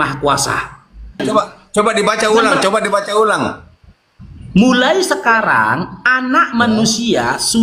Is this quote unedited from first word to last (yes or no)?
no